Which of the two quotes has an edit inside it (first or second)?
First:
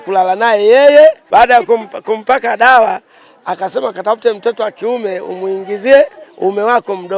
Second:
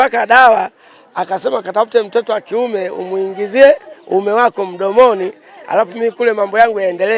first